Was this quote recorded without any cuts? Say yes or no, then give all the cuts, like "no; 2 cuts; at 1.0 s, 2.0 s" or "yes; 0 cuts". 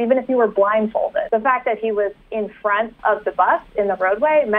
no; 2 cuts; at 1.3 s, 3.0 s